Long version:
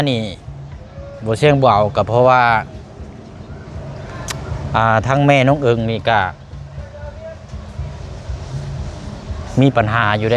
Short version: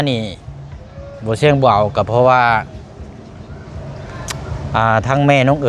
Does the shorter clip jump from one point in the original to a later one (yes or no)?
no